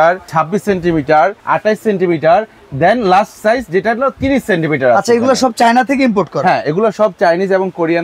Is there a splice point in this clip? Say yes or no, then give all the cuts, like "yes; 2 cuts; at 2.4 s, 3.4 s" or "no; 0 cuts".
no; 0 cuts